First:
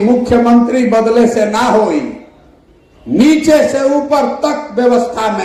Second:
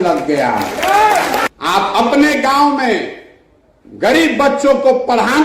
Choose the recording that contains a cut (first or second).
second